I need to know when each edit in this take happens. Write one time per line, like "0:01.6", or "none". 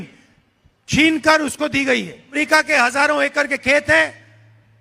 0:02.4